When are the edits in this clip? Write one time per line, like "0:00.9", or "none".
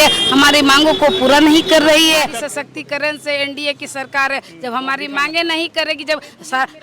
0:02.3